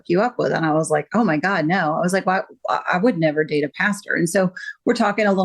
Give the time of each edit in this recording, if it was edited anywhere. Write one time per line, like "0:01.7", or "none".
none